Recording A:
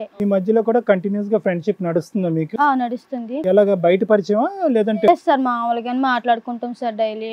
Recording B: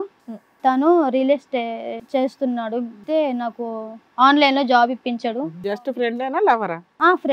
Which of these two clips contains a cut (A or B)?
B